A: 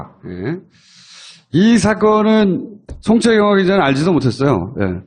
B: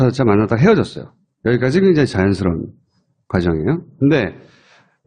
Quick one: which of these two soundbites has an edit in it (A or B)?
B